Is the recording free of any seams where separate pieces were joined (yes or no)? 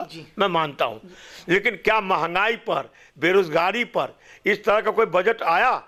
yes